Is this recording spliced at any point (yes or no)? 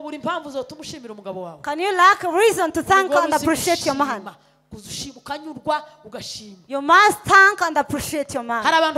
no